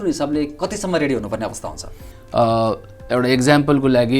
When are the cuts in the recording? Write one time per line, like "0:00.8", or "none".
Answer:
0:02.1